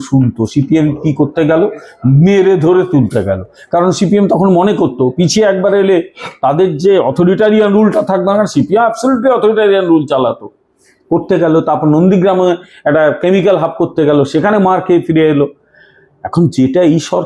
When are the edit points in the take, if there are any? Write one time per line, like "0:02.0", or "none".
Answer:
none

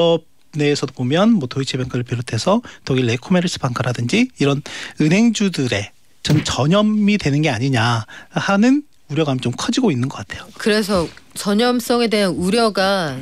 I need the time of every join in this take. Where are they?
none

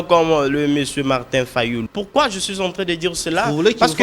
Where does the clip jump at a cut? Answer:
0:01.9

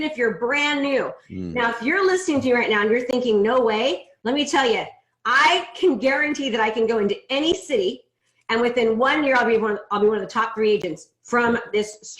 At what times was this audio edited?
0:01.2

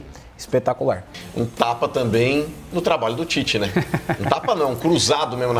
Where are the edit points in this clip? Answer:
0:01.2

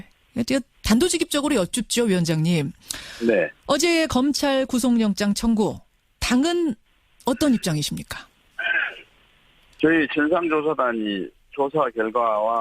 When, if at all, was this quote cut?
0:02.4

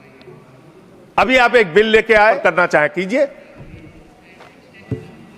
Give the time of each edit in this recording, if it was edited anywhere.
0:02.4

